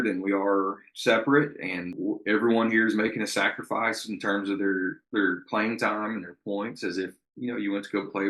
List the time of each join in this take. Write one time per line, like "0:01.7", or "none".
0:02.0